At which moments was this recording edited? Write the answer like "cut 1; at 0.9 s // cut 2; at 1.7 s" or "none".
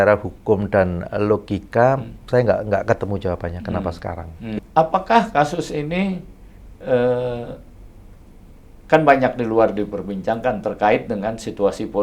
cut 1; at 4.6 s